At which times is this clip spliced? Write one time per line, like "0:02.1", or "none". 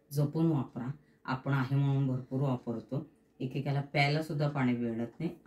none

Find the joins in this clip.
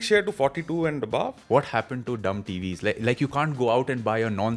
0:01.4

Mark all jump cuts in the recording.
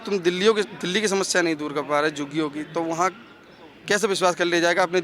none

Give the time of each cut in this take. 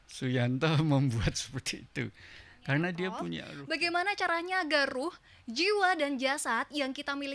0:03.5

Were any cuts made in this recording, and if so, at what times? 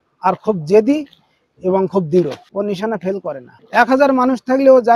0:02.4
0:03.5

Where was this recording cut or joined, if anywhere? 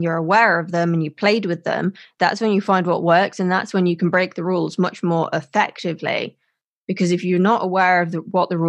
none

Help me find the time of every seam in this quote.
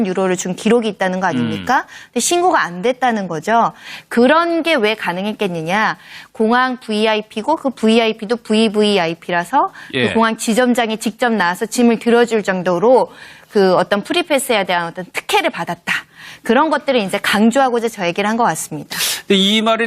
0:16.4

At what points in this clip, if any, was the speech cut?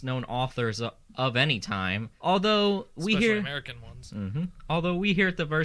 0:02.1

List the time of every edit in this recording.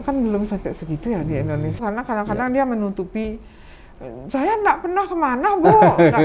0:01.7

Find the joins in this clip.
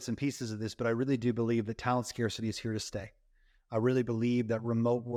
none

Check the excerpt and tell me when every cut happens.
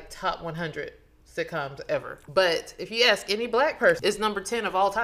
0:02.1
0:04.0

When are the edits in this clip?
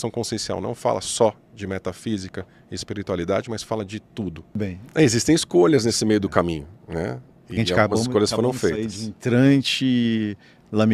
0:04.8

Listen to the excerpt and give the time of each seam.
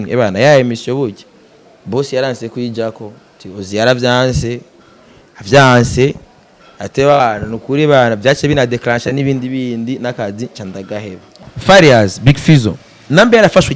0:11.3

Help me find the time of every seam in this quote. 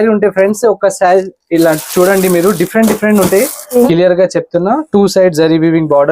0:03.8

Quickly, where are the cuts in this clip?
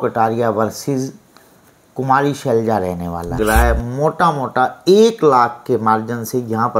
0:03.4

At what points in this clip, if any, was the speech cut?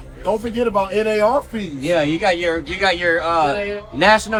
none

